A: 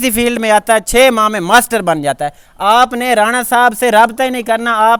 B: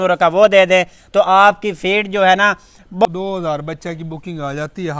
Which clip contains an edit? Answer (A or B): B